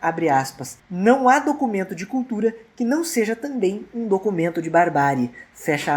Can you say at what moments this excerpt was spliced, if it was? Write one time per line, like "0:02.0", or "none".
none